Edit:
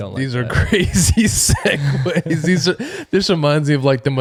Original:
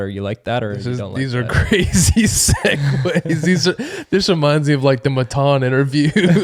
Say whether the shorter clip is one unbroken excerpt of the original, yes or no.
yes